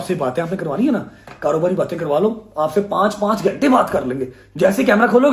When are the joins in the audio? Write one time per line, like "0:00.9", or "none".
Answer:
none